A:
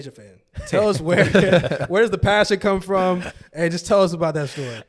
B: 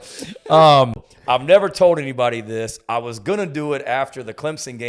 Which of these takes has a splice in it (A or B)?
B